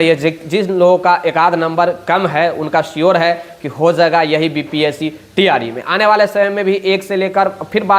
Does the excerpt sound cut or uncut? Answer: uncut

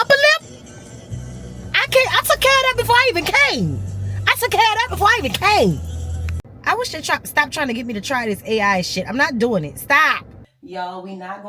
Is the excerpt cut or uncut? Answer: cut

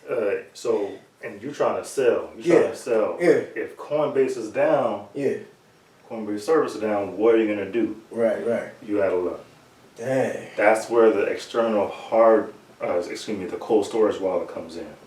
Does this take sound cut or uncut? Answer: uncut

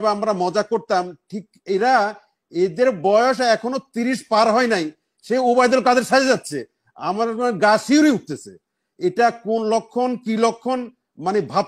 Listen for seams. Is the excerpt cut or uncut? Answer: uncut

